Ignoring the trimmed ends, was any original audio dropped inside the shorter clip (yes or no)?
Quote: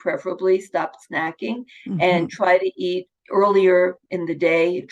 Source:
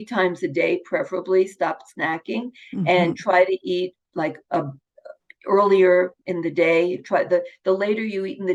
yes